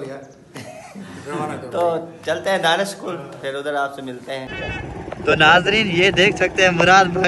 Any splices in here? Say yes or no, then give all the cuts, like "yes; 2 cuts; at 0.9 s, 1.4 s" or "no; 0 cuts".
yes; 1 cut; at 4.5 s